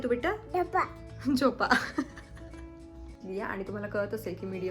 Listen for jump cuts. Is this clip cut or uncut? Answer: cut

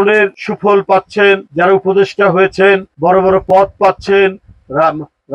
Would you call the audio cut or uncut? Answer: uncut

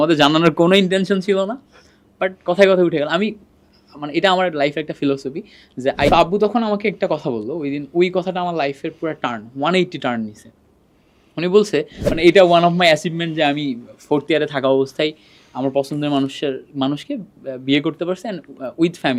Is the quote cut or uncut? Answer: cut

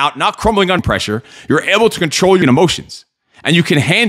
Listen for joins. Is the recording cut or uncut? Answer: cut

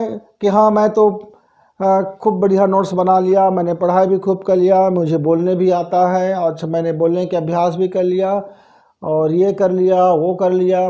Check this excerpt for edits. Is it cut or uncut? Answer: uncut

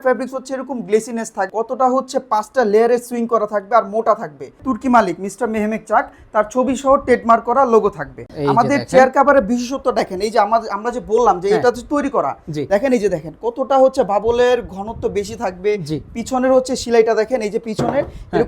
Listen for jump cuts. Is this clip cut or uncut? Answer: cut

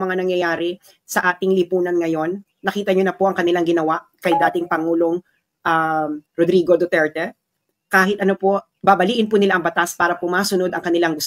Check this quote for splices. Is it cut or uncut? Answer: uncut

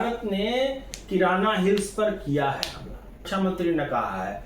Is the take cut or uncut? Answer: cut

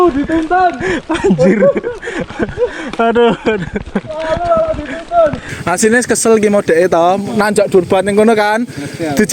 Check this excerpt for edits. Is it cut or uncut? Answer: cut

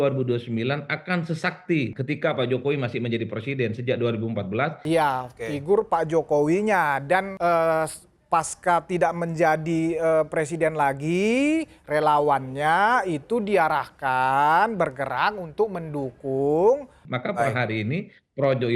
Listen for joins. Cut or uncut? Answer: cut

